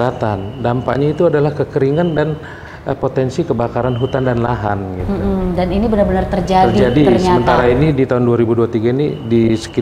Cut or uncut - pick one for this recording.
uncut